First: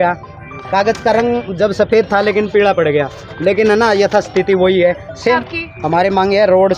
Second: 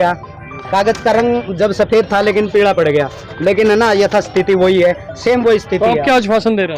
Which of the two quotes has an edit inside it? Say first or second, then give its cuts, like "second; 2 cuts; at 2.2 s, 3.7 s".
first; 1 cut; at 5.4 s